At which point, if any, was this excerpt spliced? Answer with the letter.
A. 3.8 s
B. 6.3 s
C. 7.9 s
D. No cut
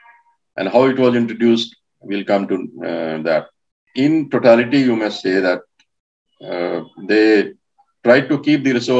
A